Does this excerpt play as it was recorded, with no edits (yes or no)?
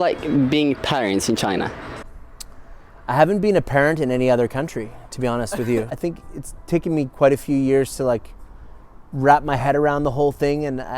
no